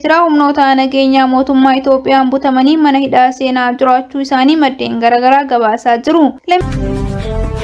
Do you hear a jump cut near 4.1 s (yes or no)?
no